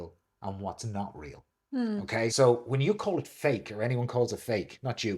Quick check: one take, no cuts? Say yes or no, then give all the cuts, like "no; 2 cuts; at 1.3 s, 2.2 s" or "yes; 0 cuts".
no; 1 cut; at 2.3 s